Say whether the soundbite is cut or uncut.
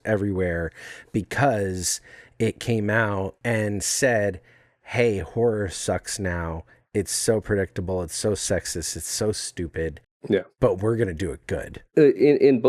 cut